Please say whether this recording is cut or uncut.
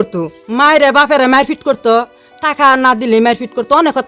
uncut